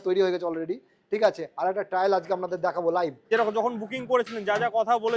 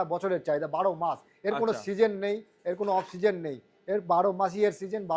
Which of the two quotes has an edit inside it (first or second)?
first